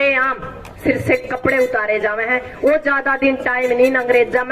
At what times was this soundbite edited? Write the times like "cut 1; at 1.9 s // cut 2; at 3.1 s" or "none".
none